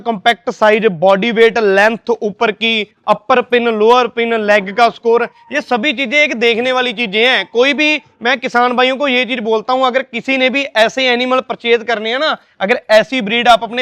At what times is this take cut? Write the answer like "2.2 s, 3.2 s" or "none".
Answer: none